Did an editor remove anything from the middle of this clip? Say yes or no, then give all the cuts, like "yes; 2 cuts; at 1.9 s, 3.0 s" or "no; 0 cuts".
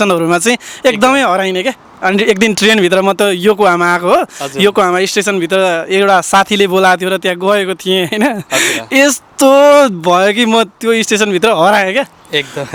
no; 0 cuts